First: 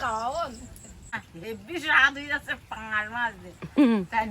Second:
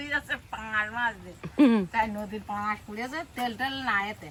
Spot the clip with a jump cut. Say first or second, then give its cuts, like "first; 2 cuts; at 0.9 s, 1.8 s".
first; 1 cut; at 1.3 s